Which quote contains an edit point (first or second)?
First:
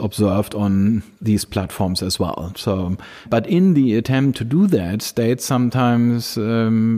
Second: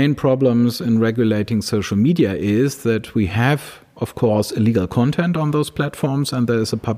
first